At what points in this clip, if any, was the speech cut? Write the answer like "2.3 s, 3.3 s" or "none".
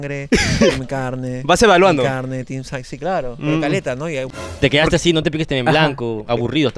4.3 s